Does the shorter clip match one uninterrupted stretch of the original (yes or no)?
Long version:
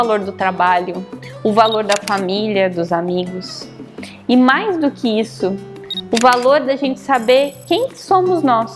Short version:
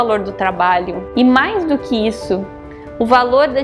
no